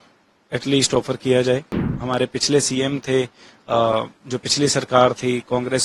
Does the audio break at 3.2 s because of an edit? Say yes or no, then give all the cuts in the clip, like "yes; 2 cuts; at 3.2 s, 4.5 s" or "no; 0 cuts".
no; 1 cut; at 1.8 s